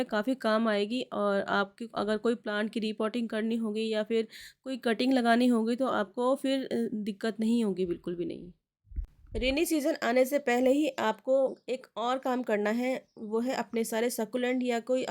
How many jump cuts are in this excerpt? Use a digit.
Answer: 0